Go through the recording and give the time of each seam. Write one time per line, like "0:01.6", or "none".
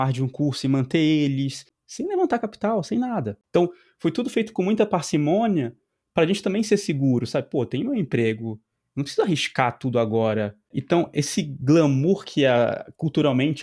0:01.7
0:03.4
0:10.8

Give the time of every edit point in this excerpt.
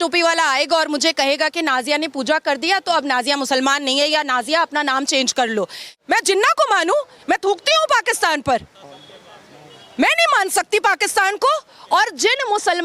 0:05.9

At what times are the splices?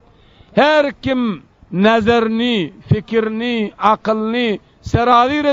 none

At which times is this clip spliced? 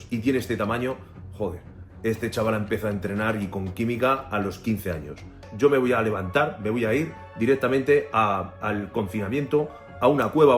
0:05.5

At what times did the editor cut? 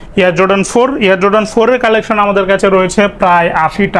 none

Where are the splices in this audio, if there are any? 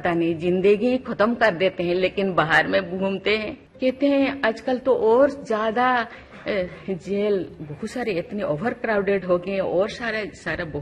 0:03.6

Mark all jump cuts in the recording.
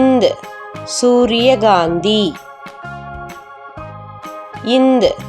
0:02.3
0:04.5

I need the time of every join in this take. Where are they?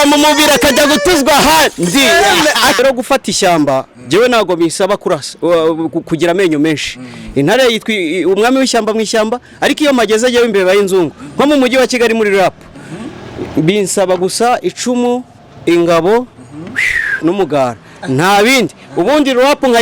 0:02.8

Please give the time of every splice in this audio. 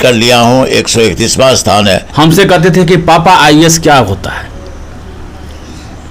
0:02.1

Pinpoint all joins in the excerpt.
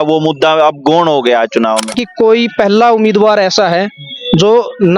0:02.0

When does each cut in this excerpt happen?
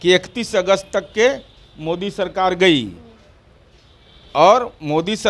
none

